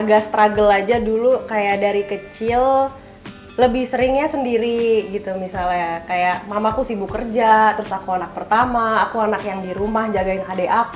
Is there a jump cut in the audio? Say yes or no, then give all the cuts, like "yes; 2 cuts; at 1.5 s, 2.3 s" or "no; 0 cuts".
no; 0 cuts